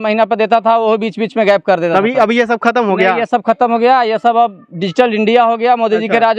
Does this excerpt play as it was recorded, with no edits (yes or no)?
yes